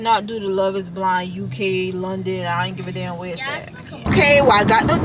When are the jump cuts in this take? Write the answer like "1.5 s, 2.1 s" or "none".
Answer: 4.1 s

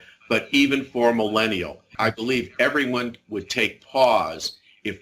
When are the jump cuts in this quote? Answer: 1.8 s

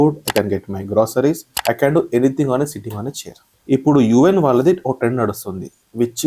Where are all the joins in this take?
1.5 s

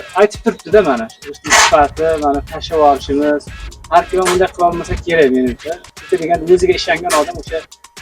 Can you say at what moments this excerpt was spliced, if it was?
none

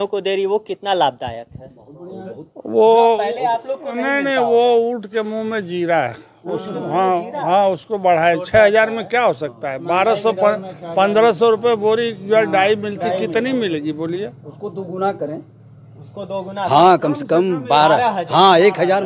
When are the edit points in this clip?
none

